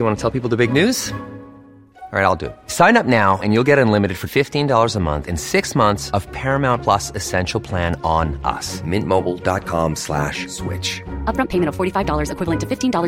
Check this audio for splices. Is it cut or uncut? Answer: uncut